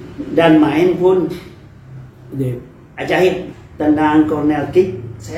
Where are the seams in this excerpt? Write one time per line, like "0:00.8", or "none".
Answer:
0:03.5